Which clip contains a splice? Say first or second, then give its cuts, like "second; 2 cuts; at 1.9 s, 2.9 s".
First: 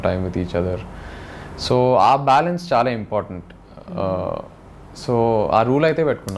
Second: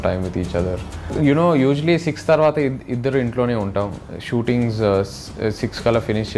second; 1 cut; at 1.1 s